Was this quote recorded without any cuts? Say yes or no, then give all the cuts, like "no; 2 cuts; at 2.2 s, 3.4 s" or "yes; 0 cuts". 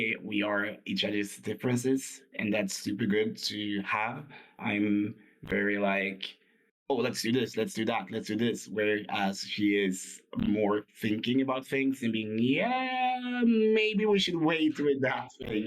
no; 1 cut; at 2.2 s